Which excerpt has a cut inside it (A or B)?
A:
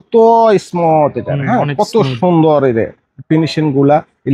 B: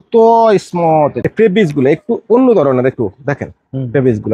B